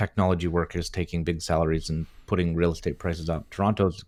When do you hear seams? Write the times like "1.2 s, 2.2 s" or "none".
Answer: none